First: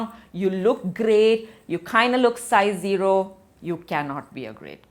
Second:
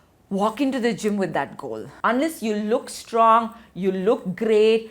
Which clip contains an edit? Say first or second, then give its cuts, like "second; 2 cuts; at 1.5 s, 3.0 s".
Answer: second; 1 cut; at 1.8 s